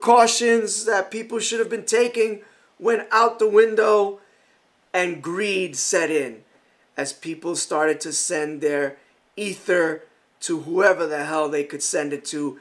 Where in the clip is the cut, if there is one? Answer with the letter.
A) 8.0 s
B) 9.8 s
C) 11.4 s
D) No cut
D